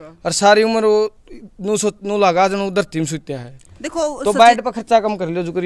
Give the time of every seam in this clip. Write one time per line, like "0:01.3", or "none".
none